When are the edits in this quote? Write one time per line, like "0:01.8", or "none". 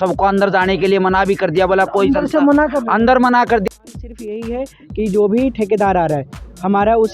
0:03.7